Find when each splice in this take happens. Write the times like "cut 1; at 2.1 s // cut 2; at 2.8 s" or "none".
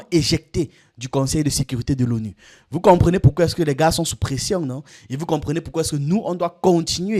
none

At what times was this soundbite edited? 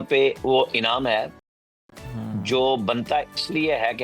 none

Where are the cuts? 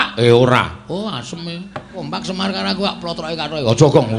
cut 1; at 1.9 s

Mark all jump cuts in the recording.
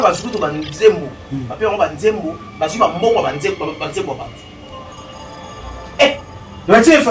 none

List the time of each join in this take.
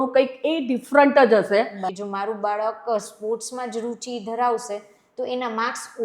cut 1; at 1.9 s

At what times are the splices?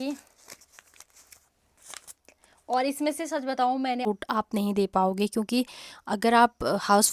cut 1; at 4.1 s

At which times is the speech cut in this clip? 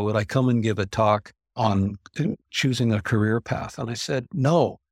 none

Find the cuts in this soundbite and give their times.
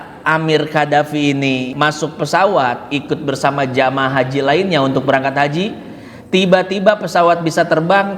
cut 1; at 1.7 s

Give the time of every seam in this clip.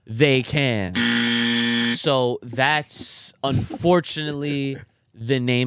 none

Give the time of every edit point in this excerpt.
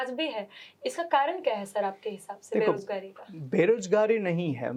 none

